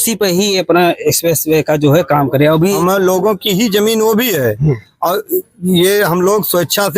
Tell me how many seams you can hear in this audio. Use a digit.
1